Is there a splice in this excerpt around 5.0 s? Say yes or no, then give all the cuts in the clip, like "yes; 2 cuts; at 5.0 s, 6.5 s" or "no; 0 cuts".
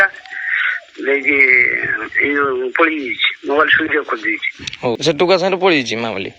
yes; 1 cut; at 5.0 s